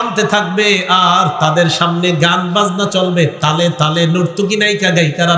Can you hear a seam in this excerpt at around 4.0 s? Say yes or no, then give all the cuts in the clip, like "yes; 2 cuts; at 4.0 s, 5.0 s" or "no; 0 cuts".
no; 0 cuts